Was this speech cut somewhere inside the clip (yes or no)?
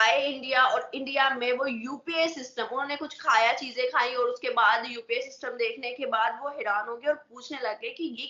no